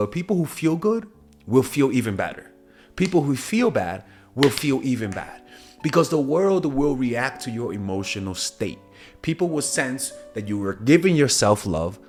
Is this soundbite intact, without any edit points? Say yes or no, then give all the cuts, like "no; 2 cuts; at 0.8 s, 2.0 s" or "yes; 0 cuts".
yes; 0 cuts